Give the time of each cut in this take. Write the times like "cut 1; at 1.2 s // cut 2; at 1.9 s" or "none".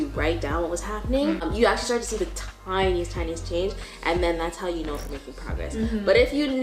cut 1; at 1.5 s

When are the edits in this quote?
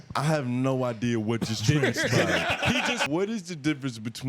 cut 1; at 3.0 s

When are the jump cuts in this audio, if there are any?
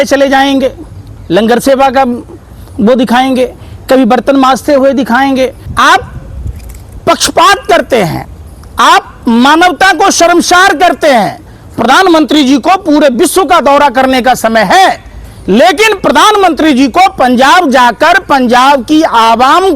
cut 1; at 5.6 s

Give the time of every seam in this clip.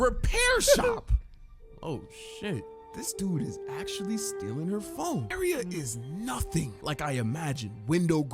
cut 1; at 2.8 s // cut 2; at 5.3 s

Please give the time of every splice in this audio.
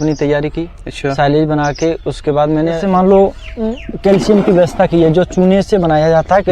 cut 1; at 2.8 s

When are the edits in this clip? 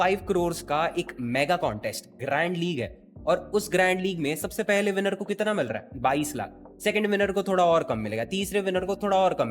none

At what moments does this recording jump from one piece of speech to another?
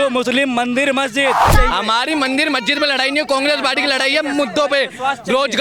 cut 1; at 1.5 s

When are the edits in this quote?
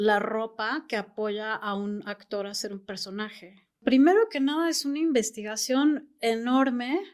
cut 1; at 3.8 s

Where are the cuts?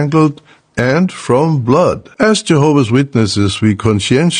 cut 1; at 2.1 s

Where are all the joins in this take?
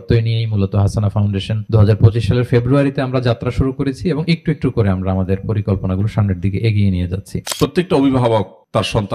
cut 1; at 1.6 s // cut 2; at 7.4 s

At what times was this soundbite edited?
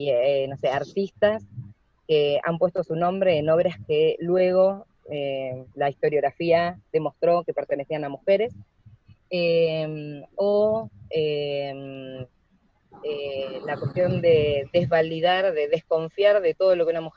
none

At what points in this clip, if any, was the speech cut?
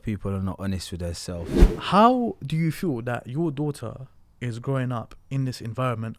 cut 1; at 1.6 s

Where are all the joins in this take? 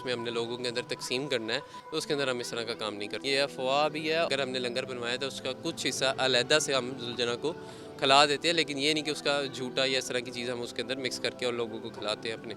cut 1; at 1.8 s // cut 2; at 3.2 s // cut 3; at 4.3 s

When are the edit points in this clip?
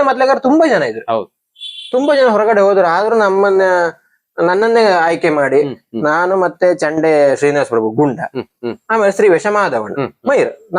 none

